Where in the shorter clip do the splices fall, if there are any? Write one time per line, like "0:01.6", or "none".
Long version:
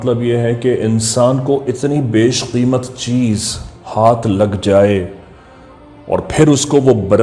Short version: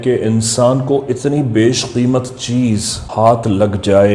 0:03.0

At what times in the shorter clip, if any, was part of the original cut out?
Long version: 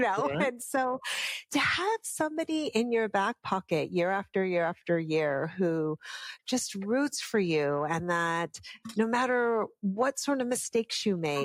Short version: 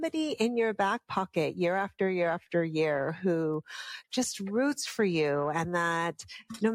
none

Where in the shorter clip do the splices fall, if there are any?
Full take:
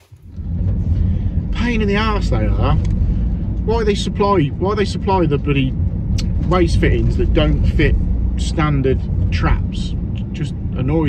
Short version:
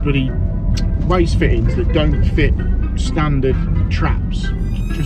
none

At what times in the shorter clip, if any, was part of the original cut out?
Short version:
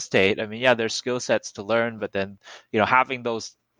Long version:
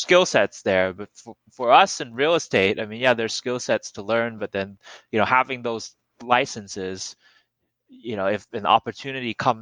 none

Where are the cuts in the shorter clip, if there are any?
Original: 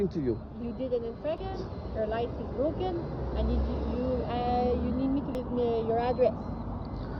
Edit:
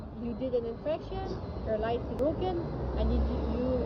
none

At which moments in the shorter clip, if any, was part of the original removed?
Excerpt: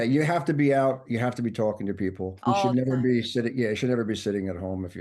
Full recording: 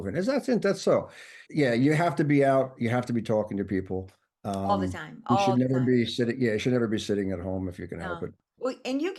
0:02.3

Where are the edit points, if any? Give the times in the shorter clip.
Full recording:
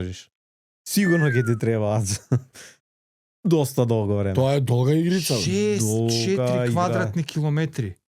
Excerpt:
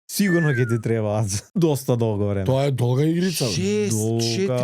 0:01.4

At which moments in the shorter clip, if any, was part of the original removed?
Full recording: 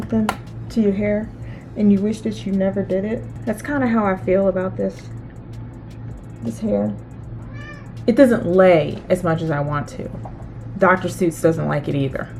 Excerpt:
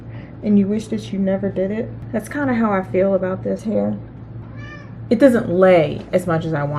0:03.6

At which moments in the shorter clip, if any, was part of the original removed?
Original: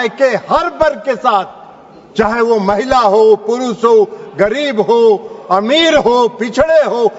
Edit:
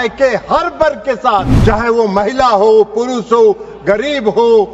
0:01.5

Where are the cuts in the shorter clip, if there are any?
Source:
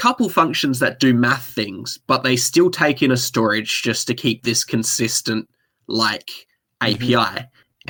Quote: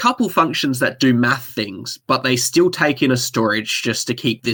none

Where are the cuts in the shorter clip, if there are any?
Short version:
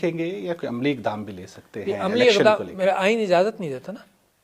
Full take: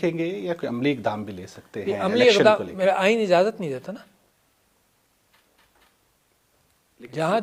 none

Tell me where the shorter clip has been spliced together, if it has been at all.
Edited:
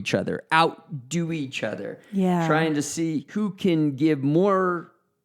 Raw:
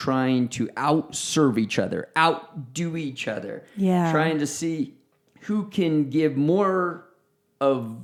0:03.3

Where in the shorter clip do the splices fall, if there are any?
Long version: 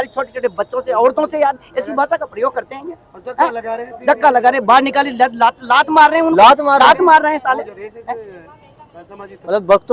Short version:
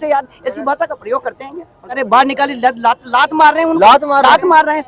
0:02.0

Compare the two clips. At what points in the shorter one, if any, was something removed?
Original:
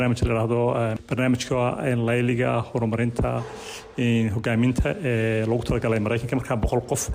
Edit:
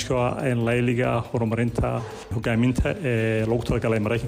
0:02.3

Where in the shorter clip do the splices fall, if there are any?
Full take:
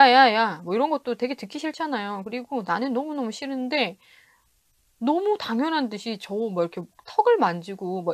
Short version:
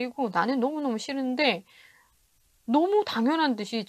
none

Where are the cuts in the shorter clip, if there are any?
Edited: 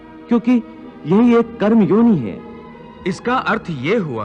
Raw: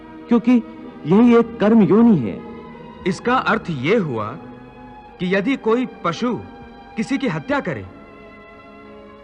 none

